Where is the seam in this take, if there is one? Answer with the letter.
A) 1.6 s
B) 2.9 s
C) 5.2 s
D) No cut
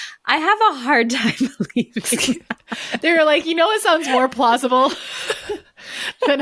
B